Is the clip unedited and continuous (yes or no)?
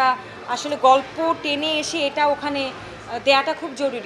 yes